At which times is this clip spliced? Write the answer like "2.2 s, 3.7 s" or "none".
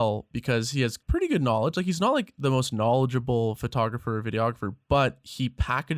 1.0 s